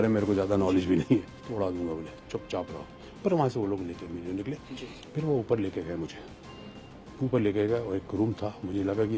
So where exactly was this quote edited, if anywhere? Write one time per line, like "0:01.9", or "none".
0:01.4
0:04.7